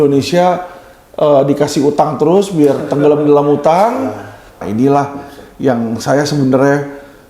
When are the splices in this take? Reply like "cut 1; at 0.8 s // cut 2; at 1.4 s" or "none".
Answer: cut 1; at 4.6 s